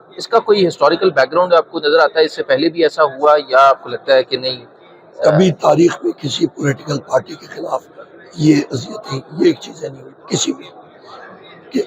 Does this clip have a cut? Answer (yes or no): no